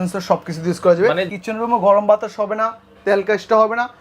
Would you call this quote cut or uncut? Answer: cut